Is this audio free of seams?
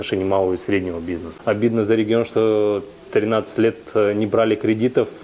no; 1 cut; at 1.3 s

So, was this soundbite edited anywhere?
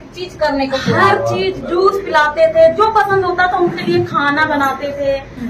no; 0 cuts

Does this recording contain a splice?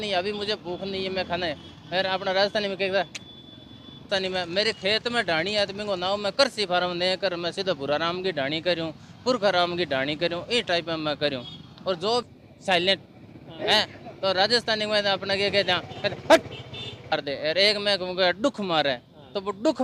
yes; 3 cuts; at 4.1 s, 12.2 s, 17.1 s

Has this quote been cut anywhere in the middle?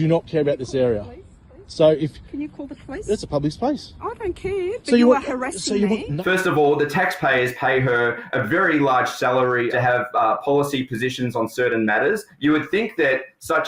yes; 3 cuts; at 6.1 s, 9.7 s, 12.3 s

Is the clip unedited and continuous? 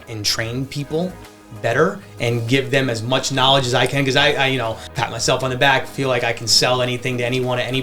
no; 1 cut; at 4.9 s

